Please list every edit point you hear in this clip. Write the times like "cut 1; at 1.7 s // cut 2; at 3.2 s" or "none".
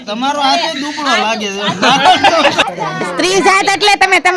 cut 1; at 2.6 s